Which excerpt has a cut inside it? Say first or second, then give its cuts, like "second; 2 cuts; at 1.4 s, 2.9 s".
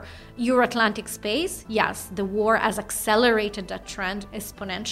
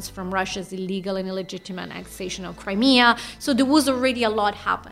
second; 1 cut; at 2.6 s